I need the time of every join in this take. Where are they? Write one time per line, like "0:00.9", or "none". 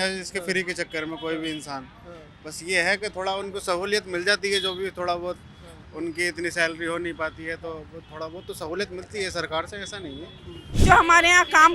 0:10.7